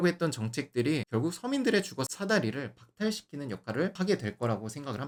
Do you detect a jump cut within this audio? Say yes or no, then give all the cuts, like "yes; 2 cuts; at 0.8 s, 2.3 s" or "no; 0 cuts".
no; 0 cuts